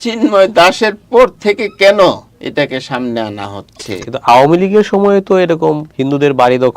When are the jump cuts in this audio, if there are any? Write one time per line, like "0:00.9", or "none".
0:02.3
0:04.0
0:05.9